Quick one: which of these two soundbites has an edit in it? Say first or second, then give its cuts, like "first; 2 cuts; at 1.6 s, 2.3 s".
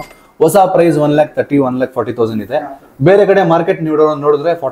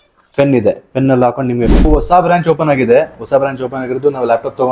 second; 1 cut; at 1.9 s